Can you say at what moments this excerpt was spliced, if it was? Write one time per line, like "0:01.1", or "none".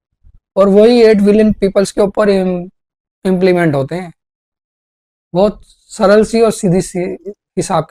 none